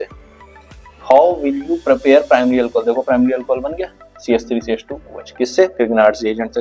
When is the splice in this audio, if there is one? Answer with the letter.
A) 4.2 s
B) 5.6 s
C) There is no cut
C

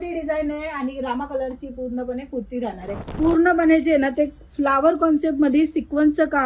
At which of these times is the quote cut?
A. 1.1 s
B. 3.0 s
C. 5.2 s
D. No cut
B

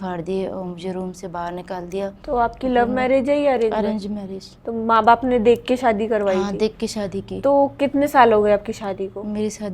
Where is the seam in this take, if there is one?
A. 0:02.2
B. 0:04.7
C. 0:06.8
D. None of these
A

